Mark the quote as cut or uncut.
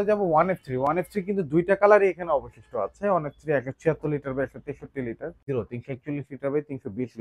cut